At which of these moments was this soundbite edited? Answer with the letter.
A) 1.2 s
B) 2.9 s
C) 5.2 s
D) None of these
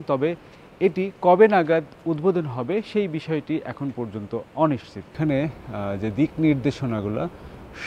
C